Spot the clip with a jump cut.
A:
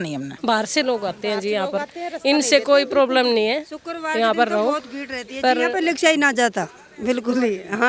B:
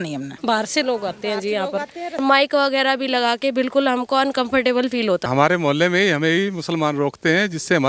B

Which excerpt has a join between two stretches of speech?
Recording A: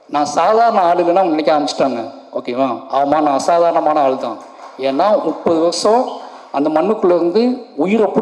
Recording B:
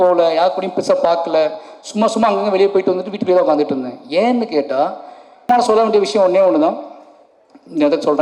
B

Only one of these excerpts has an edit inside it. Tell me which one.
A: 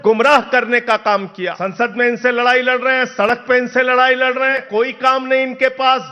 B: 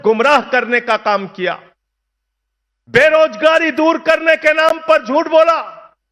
A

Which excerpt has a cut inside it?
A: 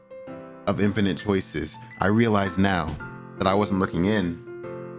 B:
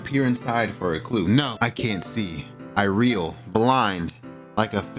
B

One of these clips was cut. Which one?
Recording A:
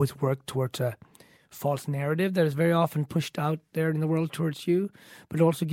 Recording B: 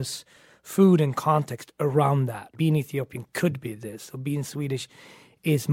B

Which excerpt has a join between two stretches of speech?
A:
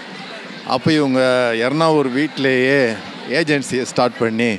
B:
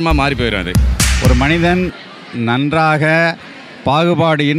B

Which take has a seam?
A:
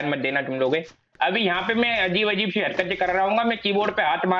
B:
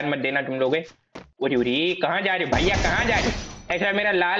A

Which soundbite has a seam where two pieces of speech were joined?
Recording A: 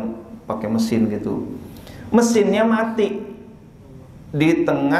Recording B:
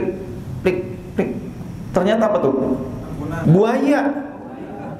B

